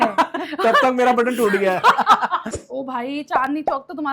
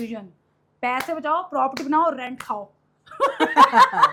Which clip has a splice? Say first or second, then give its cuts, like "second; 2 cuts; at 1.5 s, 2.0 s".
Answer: first; 1 cut; at 2.4 s